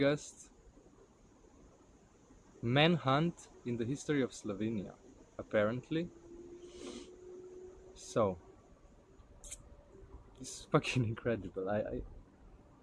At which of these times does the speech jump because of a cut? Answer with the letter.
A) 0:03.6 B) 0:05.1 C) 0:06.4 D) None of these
A